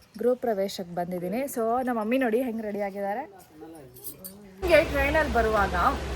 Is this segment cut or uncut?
cut